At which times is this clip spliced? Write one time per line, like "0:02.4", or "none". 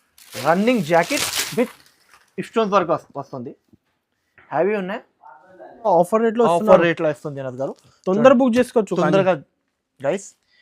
0:05.9